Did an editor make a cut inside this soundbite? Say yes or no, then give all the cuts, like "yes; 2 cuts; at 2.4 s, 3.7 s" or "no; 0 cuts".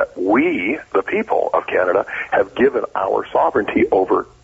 no; 0 cuts